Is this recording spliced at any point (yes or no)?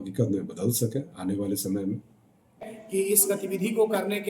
yes